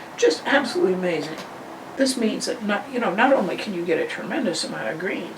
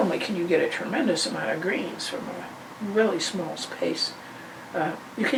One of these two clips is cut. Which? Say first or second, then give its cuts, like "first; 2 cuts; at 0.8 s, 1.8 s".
first; 1 cut; at 1.9 s